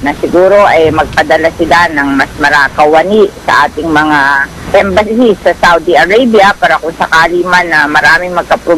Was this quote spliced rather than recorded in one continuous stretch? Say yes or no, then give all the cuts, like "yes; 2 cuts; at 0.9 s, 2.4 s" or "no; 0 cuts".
yes; 2 cuts; at 2.7 s, 4.5 s